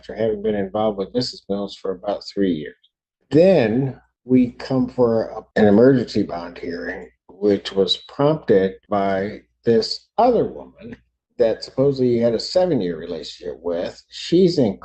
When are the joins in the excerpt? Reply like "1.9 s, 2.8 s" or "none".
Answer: 5.4 s